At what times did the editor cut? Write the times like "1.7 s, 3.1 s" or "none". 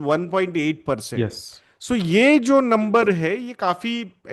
none